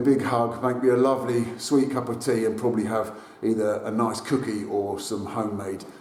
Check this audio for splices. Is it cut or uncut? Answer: uncut